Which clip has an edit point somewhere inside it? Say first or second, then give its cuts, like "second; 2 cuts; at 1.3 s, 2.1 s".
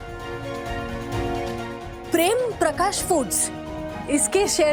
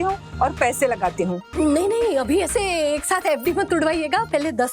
second; 1 cut; at 1.4 s